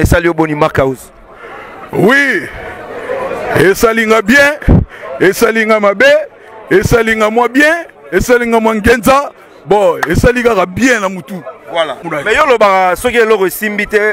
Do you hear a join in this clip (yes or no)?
yes